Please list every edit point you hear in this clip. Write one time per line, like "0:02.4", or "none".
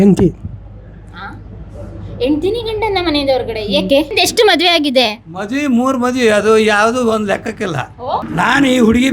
0:04.1
0:08.2

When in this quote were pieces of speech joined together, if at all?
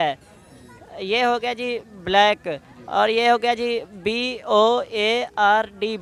none

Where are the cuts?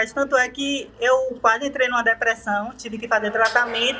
none

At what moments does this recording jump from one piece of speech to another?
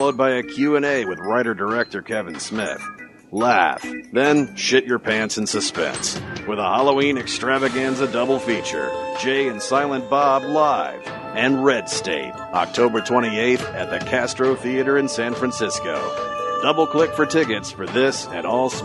0:02.2

